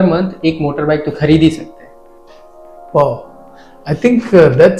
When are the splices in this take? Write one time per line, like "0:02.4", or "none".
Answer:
none